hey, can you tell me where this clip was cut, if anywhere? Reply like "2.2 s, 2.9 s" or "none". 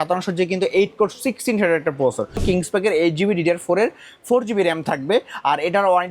2.4 s